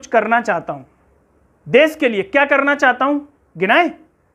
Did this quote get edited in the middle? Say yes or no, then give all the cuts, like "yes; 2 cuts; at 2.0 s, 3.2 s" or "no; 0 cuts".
no; 0 cuts